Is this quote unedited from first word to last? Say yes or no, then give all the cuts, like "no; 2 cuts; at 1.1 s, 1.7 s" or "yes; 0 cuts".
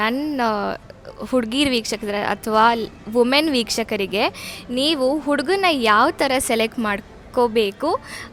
yes; 0 cuts